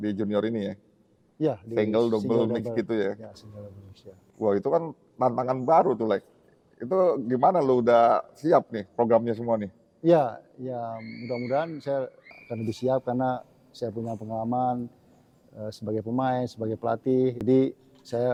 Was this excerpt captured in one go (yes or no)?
yes